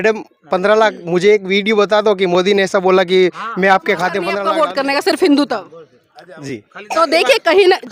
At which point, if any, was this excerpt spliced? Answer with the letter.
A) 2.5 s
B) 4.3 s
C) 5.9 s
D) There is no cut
B